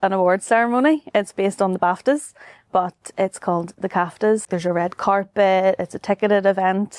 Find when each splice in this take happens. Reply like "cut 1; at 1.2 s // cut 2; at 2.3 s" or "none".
cut 1; at 4.5 s